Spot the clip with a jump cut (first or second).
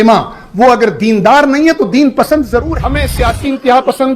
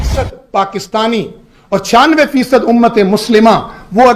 first